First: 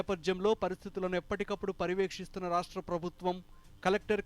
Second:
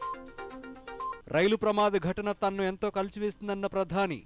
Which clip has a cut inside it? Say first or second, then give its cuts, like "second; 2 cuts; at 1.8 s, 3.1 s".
second; 1 cut; at 1.2 s